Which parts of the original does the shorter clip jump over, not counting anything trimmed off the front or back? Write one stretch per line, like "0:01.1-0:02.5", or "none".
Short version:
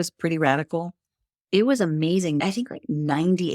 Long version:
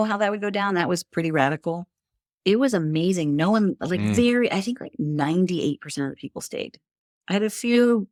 0:03.3-0:04.5